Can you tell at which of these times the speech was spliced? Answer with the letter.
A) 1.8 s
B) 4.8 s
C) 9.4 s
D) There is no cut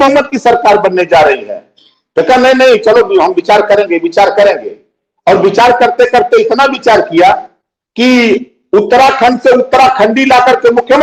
D